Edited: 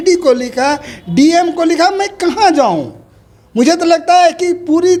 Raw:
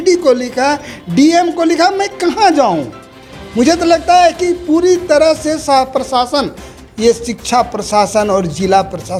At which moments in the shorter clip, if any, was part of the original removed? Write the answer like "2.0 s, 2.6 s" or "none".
none